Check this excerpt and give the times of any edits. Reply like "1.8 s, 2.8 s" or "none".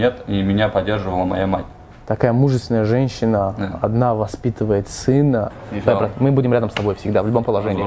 1.9 s, 5.6 s